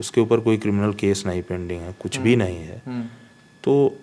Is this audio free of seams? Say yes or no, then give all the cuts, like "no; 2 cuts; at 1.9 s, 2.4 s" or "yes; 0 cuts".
yes; 0 cuts